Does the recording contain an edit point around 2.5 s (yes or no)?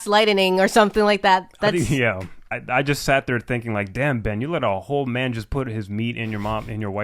yes